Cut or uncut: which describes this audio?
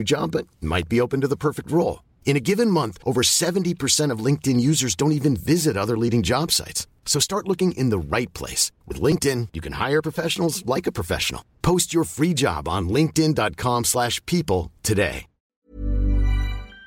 cut